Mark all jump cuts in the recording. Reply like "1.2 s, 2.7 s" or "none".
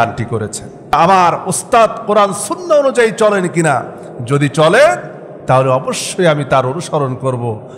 0.9 s